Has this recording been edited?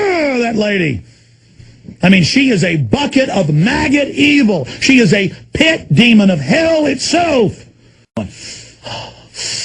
yes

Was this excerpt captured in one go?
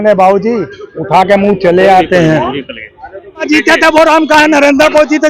no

